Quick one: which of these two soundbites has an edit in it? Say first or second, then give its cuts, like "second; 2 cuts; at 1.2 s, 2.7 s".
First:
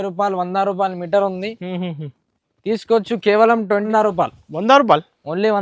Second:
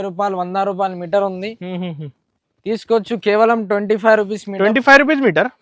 first; 1 cut; at 3.8 s